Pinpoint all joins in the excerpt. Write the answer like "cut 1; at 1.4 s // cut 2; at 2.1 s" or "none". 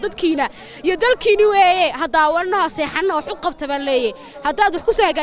none